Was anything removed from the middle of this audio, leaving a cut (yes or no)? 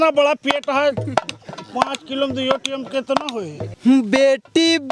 yes